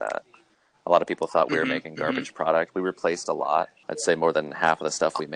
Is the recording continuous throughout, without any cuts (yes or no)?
no